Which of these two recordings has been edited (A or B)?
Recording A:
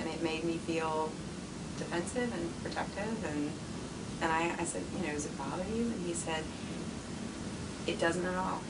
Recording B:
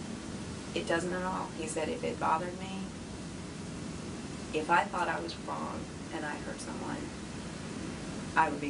A